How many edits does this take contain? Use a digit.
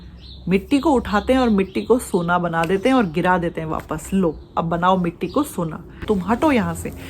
1